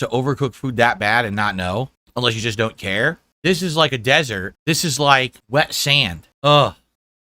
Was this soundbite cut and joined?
no; 0 cuts

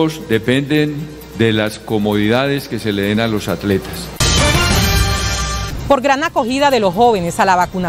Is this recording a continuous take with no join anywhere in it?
no; 2 cuts; at 4.2 s, 5.7 s

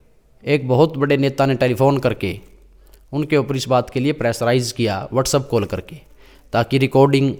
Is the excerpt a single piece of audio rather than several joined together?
yes; 0 cuts

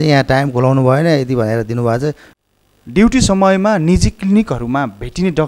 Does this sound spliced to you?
yes; 1 cut; at 2.3 s

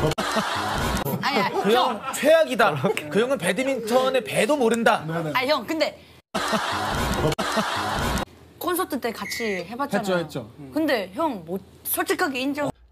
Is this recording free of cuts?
no; 1 cut; at 1.0 s

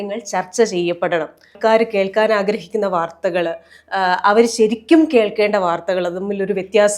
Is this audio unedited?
no; 1 cut; at 1.5 s

